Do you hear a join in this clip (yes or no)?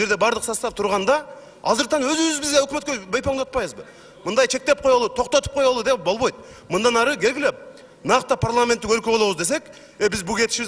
no